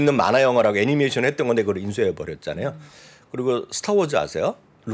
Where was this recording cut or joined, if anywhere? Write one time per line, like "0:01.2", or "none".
none